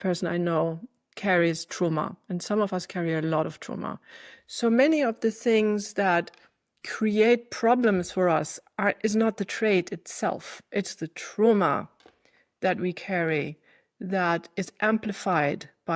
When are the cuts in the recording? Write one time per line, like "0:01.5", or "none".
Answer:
none

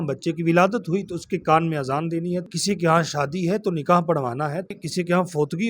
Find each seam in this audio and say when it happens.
0:02.5
0:04.7

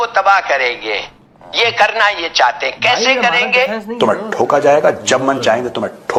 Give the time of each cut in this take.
none

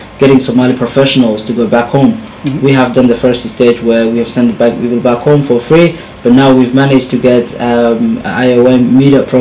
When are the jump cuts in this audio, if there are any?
0:05.9

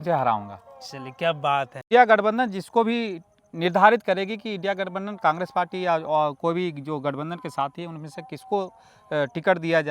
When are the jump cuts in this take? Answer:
0:01.9

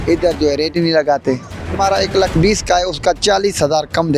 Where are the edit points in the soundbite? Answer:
0:01.7

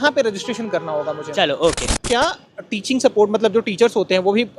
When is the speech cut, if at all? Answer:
0:02.0

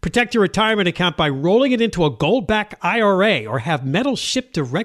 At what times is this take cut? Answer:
none

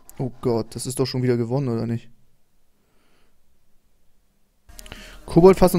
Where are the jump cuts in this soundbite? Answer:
0:04.7

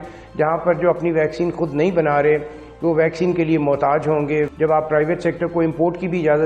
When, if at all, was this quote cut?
0:04.5

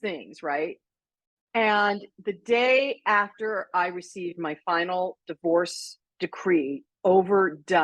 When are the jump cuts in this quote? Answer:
none

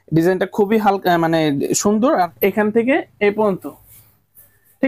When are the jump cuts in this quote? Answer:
0:02.3

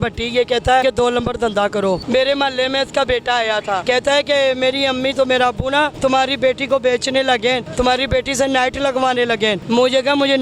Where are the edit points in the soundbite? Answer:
0:00.8
0:02.0
0:03.8
0:05.9
0:07.7
0:09.6

